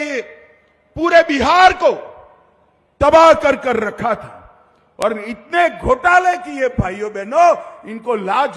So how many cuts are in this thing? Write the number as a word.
zero